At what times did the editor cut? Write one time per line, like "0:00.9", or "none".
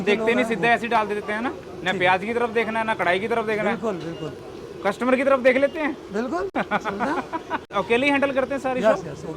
none